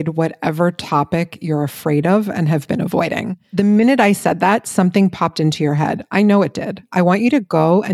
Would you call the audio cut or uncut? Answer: cut